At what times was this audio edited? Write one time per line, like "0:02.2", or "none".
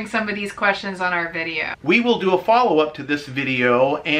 0:01.8